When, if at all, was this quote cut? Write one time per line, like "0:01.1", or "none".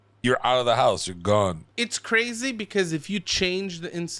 0:01.7